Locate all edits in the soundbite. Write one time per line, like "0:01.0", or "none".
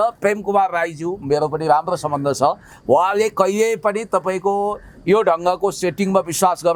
none